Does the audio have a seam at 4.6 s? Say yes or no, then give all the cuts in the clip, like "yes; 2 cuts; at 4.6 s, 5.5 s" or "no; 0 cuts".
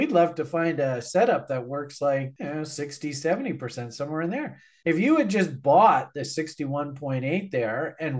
yes; 1 cut; at 4.6 s